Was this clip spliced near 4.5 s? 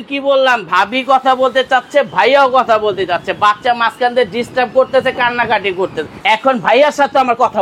no; 1 cut; at 6.2 s

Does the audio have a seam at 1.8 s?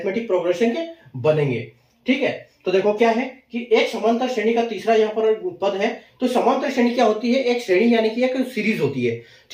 no; 0 cuts

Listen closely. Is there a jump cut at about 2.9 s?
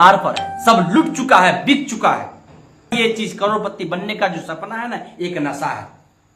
yes; 1 cut; at 2.9 s

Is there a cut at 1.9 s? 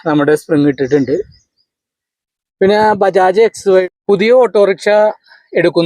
no; 1 cut; at 3.8 s

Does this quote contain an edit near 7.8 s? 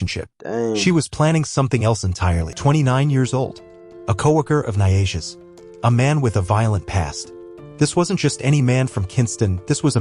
no; 1 cut; at 2.5 s

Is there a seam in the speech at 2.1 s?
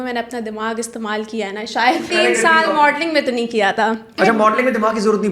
yes; 2 cuts; at 2.1 s, 4.1 s

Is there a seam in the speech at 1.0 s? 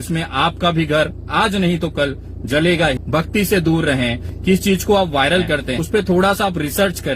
no; 3 cuts; at 3.0 s, 4.3 s, 5.7 s

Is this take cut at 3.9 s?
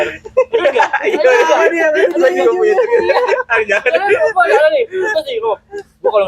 no; 0 cuts

